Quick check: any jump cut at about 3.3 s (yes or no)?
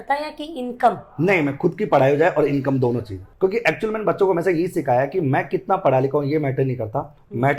no